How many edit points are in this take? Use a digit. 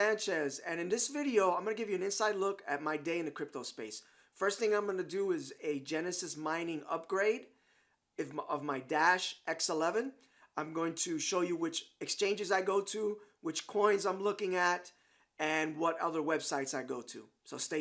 0